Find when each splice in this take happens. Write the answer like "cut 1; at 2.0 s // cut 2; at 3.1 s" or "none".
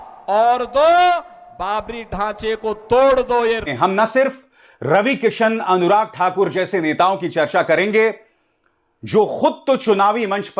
cut 1; at 3.7 s